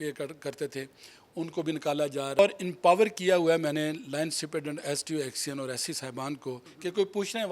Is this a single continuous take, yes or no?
no